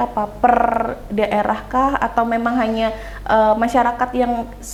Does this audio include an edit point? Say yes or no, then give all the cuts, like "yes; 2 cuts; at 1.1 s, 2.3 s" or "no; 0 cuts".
no; 0 cuts